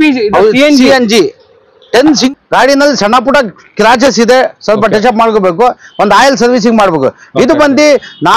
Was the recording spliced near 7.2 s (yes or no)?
no